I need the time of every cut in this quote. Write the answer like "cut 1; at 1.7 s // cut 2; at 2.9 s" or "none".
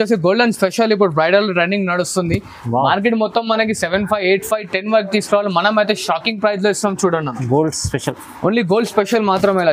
none